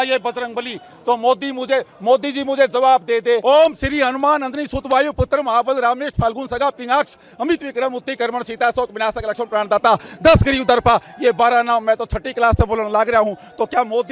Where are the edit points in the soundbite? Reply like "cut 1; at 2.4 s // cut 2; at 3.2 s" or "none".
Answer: cut 1; at 3.4 s